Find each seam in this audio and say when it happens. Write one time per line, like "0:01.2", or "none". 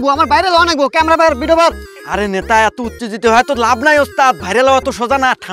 none